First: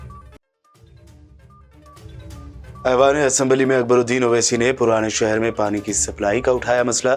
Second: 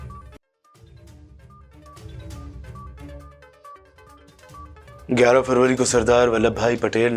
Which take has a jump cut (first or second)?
first